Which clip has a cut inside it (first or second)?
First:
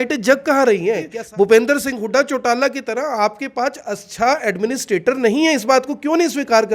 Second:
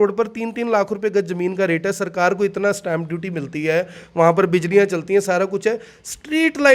first